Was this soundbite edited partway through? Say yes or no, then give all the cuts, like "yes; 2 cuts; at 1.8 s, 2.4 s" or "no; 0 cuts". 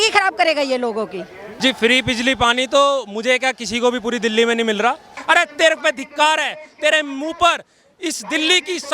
yes; 2 cuts; at 1.4 s, 5.1 s